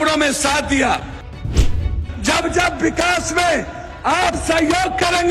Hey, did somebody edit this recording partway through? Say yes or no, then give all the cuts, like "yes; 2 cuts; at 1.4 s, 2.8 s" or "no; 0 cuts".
yes; 1 cut; at 1.7 s